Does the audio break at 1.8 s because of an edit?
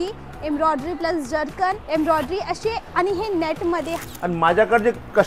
yes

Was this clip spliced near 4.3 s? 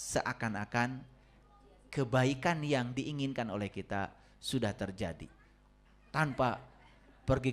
no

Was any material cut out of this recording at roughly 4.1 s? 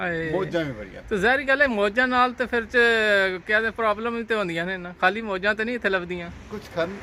no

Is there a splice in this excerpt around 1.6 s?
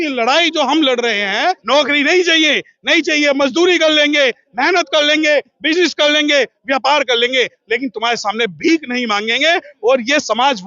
yes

